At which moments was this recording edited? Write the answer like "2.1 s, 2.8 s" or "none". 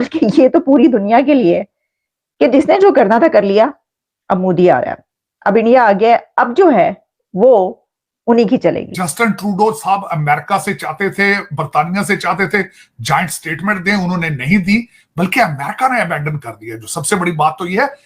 8.9 s